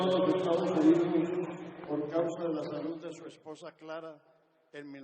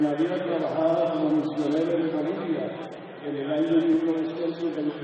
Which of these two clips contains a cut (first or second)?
first